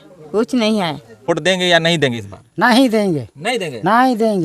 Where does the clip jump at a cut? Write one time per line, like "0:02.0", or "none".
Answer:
0:01.3